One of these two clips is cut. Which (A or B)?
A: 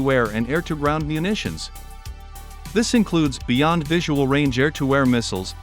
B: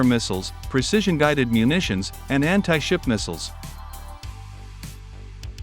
B